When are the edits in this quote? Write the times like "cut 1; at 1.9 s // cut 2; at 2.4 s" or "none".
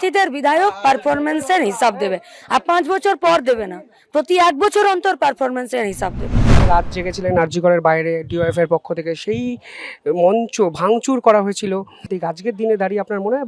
cut 1; at 6.6 s // cut 2; at 12.1 s